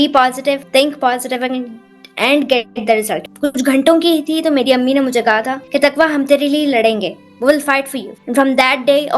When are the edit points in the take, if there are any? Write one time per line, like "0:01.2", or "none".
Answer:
0:03.2